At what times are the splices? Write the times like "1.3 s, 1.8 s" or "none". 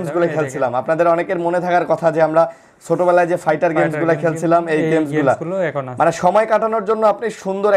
none